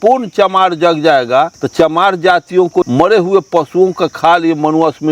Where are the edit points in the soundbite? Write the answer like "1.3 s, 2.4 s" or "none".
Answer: 1.6 s, 2.9 s